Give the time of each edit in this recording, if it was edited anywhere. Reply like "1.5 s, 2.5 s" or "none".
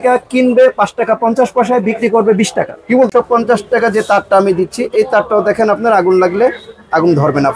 3.1 s

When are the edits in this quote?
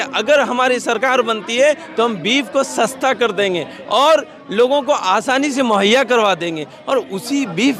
none

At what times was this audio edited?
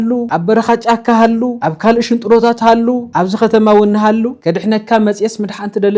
4.4 s

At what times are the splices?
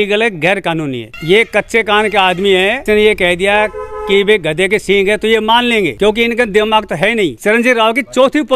1.1 s, 2.8 s, 5.9 s, 7.4 s

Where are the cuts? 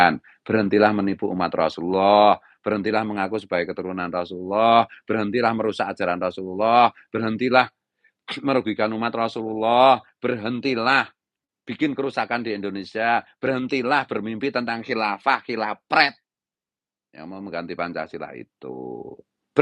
none

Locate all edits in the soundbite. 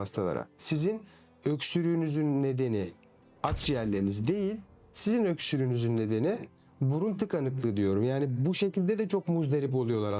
none

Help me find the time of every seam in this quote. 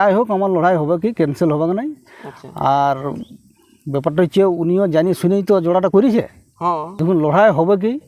6.9 s

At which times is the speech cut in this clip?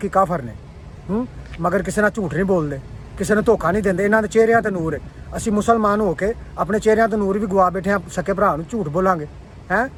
none

